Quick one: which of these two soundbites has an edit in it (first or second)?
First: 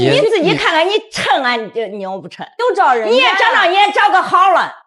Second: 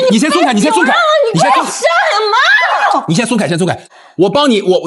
second